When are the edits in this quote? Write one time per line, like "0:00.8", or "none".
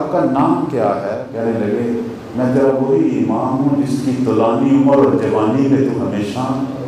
0:01.2